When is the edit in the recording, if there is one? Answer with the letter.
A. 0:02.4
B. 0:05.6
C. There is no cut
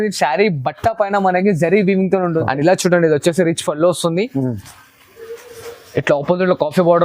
A